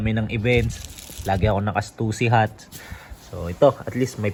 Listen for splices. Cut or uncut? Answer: uncut